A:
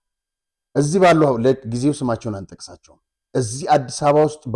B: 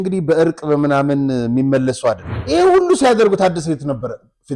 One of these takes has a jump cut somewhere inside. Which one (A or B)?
B